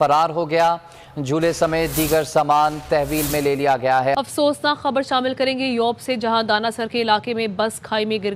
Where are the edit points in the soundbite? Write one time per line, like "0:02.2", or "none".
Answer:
0:04.1